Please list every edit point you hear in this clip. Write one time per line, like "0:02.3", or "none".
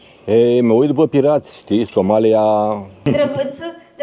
0:02.9

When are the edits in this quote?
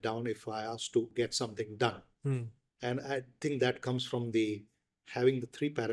0:01.1

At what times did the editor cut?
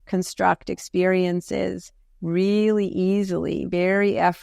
none

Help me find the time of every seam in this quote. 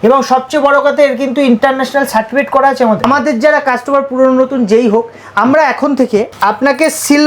0:03.0
0:06.3

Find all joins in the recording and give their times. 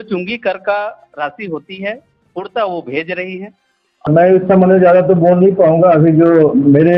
0:04.1

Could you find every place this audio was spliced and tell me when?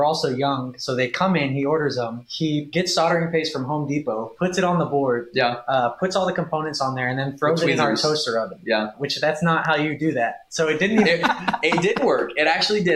0:02.6
0:09.0

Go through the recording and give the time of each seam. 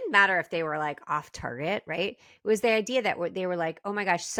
none

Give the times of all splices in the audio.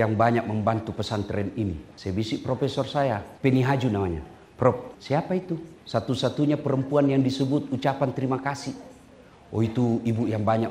0:01.9
0:03.3
0:05.4

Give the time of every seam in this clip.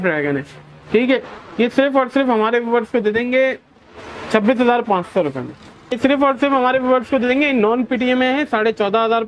0:06.0

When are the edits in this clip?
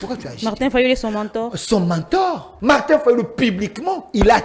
0:02.5

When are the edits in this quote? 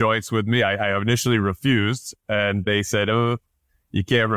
0:02.6

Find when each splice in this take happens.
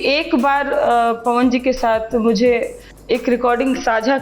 0:02.9

